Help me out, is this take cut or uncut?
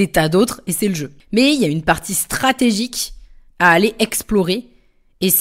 cut